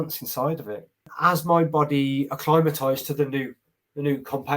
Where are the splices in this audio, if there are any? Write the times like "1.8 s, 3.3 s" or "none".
1.1 s